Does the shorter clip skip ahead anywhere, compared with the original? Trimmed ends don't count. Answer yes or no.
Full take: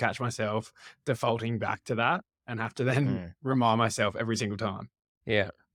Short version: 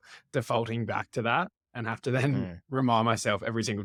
no